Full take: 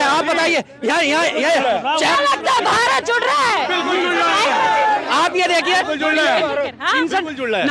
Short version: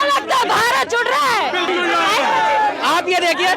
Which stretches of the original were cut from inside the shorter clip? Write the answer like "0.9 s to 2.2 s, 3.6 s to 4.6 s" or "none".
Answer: 3.8 s to 3.9 s

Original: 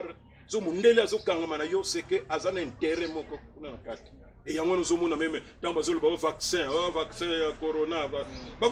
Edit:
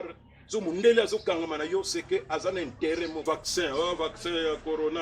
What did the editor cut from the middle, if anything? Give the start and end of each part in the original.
3.2 s to 6.2 s

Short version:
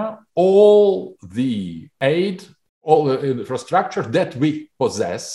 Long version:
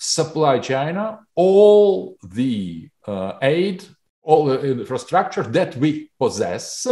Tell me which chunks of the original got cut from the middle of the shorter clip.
2.9 s to 3.3 s

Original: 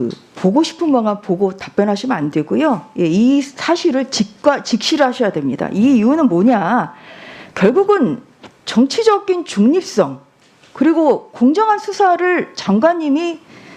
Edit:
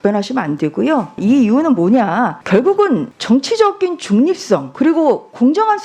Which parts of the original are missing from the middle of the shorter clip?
2.9 s to 5.7 s, 6.9 s to 7.5 s, 8.2 s to 8.6 s, 10.2 s to 10.7 s

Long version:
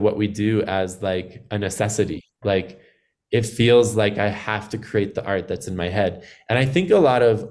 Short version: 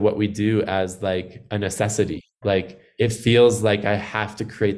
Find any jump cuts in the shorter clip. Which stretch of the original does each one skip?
2.8 s to 3.1 s

